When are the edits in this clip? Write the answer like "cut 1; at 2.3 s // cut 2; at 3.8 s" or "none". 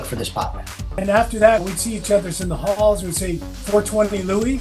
cut 1; at 1.0 s // cut 2; at 1.6 s